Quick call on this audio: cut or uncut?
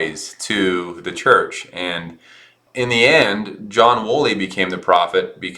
cut